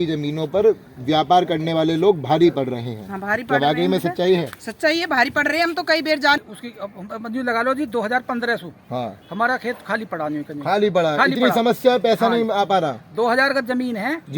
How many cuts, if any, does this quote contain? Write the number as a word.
one